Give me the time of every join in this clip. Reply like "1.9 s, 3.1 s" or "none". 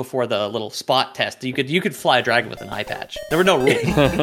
none

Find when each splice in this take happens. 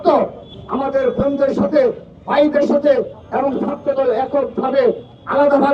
3.2 s

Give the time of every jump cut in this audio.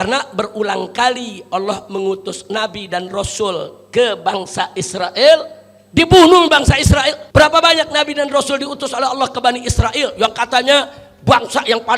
7.2 s

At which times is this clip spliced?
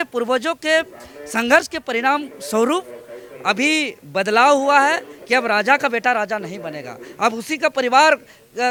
none

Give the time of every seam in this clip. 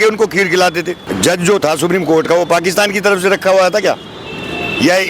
1.1 s

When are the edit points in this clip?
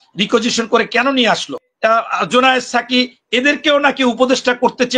1.7 s

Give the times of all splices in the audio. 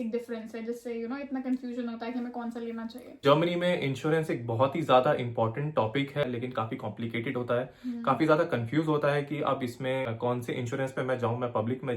3.2 s, 6.2 s, 10.1 s

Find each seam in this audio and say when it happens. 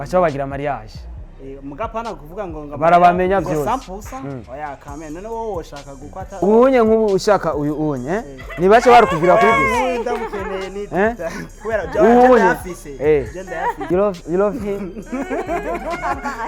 6.2 s, 13.8 s

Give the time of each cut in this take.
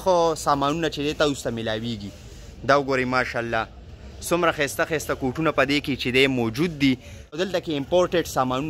7.5 s

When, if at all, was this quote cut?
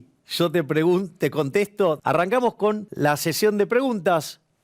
2.0 s, 2.9 s

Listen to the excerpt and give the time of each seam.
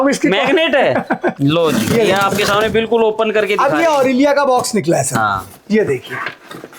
1.3 s

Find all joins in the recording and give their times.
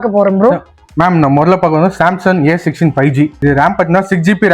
3.3 s

